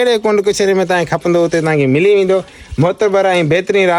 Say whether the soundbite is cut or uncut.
uncut